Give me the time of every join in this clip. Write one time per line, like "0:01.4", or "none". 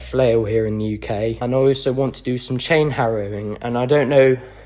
0:01.4